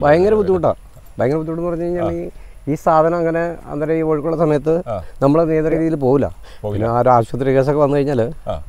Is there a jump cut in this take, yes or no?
yes